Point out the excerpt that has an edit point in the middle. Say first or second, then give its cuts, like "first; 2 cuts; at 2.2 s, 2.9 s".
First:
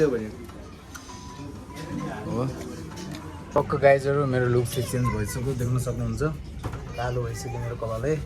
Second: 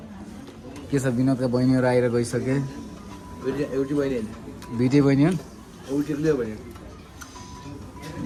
first; 1 cut; at 3.3 s